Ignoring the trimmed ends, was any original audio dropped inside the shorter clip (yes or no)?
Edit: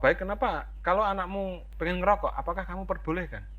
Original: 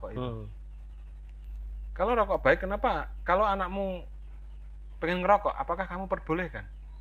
yes